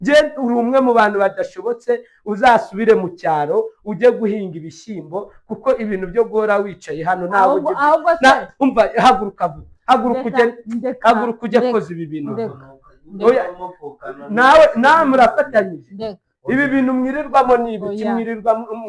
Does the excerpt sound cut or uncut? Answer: uncut